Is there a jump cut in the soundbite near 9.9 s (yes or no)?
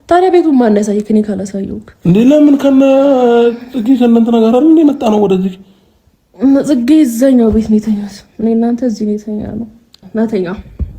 yes